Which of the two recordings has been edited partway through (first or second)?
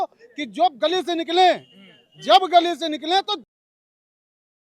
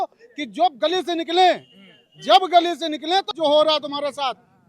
second